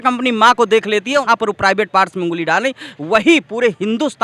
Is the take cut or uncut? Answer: cut